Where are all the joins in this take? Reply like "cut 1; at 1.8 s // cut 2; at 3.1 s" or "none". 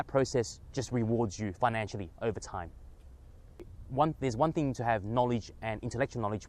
cut 1; at 3.8 s

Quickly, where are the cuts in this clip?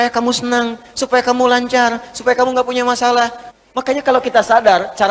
cut 1; at 3.4 s

